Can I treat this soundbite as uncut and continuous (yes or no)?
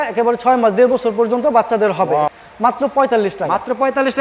no